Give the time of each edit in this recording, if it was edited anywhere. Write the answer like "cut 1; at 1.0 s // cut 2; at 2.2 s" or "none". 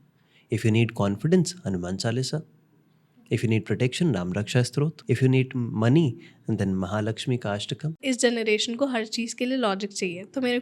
cut 1; at 5.0 s // cut 2; at 8.0 s